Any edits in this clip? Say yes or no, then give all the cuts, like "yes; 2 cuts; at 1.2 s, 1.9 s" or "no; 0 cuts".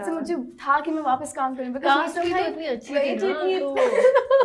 no; 0 cuts